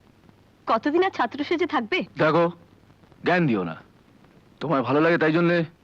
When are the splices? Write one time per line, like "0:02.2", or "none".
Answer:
0:02.1